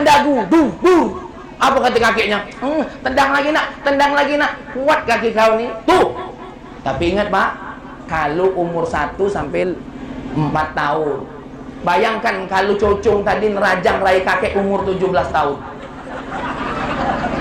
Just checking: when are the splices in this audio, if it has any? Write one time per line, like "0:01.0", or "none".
none